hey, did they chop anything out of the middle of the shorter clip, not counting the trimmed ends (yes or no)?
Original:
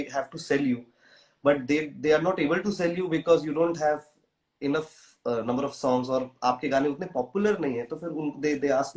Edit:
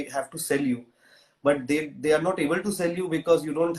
no